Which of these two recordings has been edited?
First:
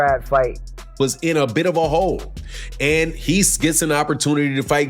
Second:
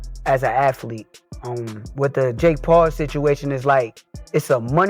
first; 1 cut; at 1.0 s

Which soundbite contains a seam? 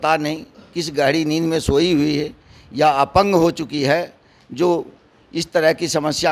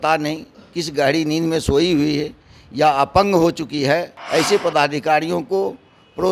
second; 1 cut; at 4.2 s

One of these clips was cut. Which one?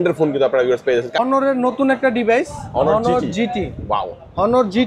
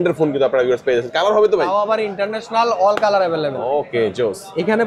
first; 1 cut; at 1.2 s

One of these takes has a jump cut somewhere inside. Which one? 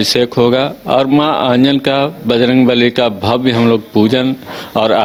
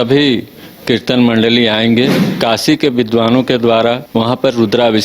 second; 2 cuts; at 2.2 s, 4.0 s

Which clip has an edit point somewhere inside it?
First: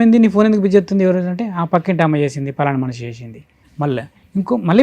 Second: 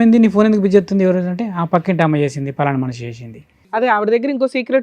second; 1 cut; at 3.8 s

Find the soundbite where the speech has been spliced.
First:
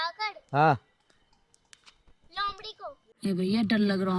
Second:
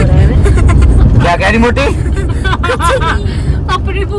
first; 1 cut; at 3.1 s

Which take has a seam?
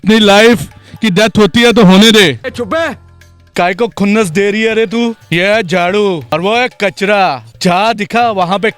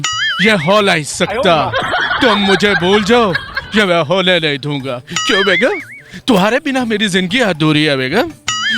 first; 4 cuts; at 3.4 s, 5.2 s, 6.2 s, 7.5 s

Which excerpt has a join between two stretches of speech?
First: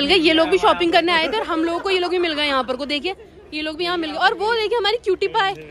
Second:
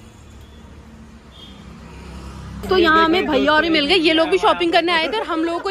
second; 1 cut; at 2.6 s

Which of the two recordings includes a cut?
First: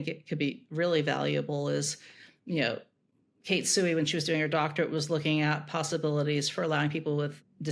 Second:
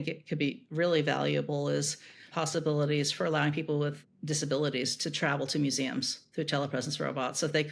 second; 1 cut; at 2.3 s

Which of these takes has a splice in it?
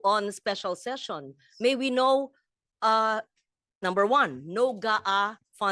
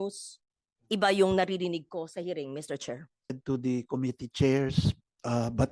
second; 1 cut; at 3.4 s

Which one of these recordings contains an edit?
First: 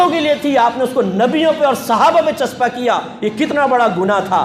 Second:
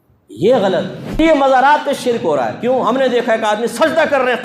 second; 1 cut; at 1.0 s

